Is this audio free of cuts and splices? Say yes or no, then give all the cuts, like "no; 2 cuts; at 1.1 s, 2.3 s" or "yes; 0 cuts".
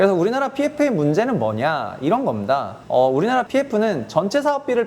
no; 1 cut; at 2.8 s